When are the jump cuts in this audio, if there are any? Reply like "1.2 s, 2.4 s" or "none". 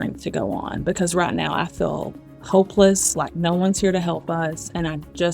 none